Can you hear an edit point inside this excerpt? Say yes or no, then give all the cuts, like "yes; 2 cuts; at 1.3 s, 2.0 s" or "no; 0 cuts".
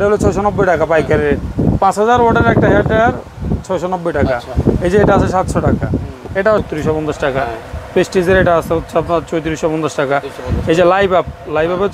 yes; 1 cut; at 6.6 s